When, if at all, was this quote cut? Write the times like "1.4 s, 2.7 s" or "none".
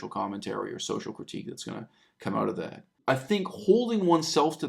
2.9 s